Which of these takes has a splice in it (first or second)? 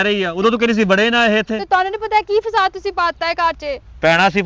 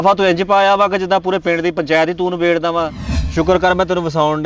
second